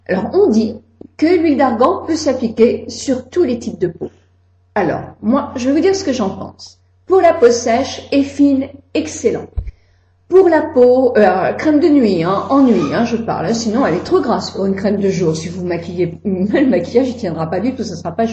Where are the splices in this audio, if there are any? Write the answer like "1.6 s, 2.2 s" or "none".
14.7 s

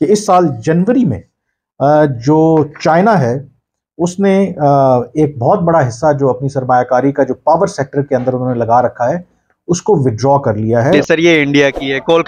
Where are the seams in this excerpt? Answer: 11.0 s

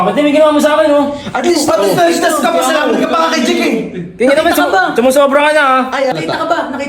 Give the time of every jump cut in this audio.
none

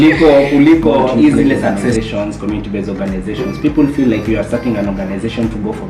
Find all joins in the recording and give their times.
2.0 s

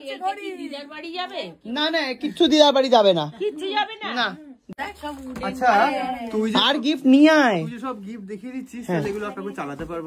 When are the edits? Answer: 4.7 s

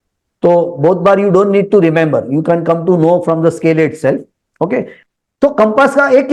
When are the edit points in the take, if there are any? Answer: 4.9 s

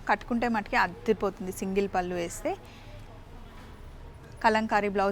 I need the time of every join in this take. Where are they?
none

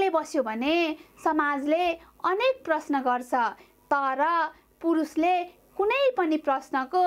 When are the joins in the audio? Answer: none

